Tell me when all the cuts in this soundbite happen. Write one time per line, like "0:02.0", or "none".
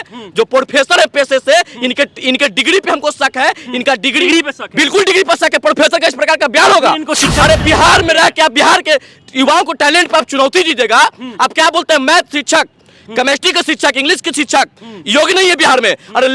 none